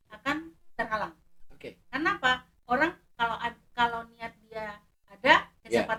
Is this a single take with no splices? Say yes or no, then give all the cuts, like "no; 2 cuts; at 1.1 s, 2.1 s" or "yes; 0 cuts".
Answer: yes; 0 cuts